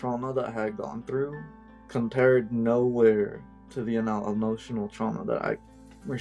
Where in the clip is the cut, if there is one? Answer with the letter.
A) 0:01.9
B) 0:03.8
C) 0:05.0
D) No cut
D